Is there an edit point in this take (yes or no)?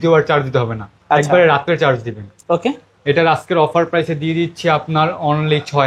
no